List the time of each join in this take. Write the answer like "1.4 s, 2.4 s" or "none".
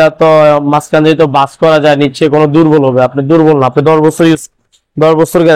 none